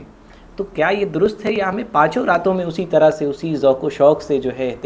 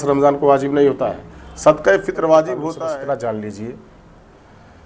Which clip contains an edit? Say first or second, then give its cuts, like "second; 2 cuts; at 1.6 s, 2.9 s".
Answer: second; 1 cut; at 2.6 s